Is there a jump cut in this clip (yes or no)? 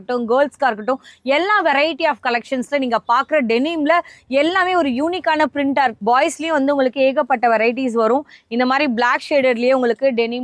yes